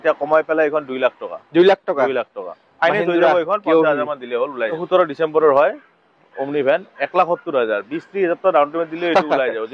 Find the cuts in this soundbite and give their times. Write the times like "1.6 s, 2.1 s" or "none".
4.8 s

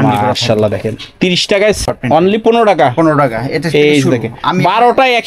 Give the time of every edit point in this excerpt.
1.9 s

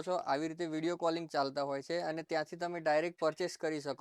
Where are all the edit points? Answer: none

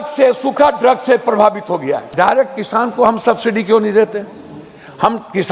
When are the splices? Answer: 2.1 s

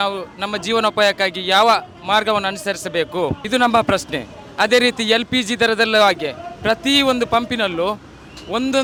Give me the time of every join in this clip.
none

